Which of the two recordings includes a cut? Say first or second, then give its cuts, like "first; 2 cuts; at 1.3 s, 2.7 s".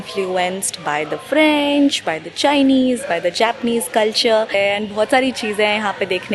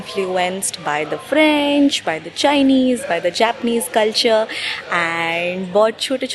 first; 1 cut; at 4.5 s